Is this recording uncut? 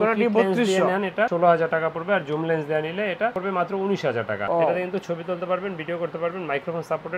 yes; 0 cuts

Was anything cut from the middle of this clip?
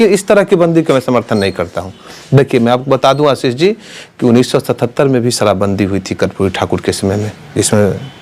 no; 0 cuts

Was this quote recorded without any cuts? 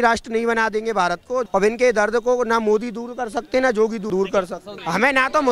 no; 2 cuts; at 1.5 s, 4.5 s

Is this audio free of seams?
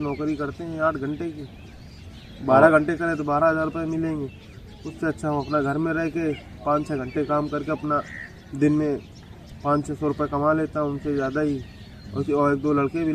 yes; 0 cuts

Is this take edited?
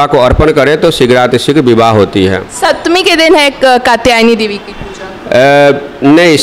no; 0 cuts

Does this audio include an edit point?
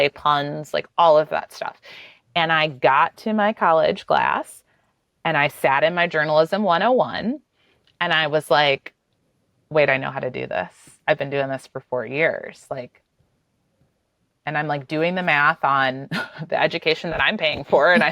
no; 0 cuts

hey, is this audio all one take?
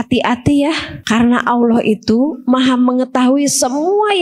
no; 1 cut; at 0.9 s

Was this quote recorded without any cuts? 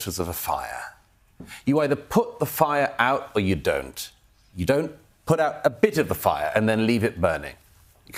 yes; 0 cuts

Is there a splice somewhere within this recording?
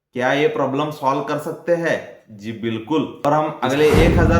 yes; 1 cut; at 3.1 s

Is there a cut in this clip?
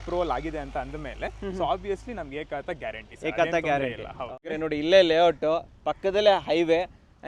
yes; 1 cut; at 4.5 s

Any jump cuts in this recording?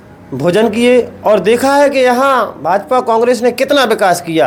no; 0 cuts

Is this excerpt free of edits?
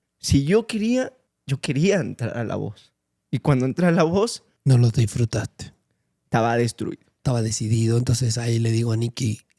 no; 1 cut; at 7.2 s

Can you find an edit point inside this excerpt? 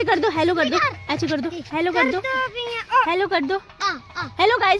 no; 0 cuts

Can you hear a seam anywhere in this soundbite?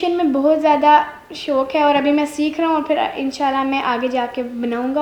no; 0 cuts

